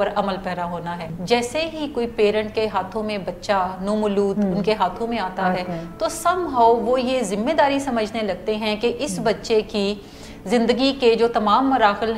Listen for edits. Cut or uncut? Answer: cut